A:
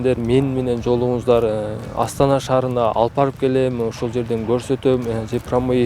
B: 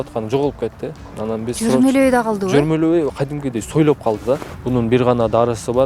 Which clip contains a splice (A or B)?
B